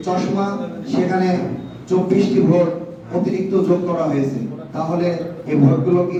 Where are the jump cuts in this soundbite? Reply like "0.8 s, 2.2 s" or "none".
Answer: none